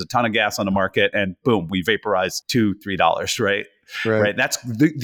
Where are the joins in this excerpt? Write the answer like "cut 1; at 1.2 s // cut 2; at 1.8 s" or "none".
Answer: cut 1; at 2.4 s